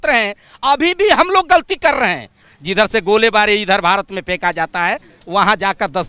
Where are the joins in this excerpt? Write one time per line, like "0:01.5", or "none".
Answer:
0:02.4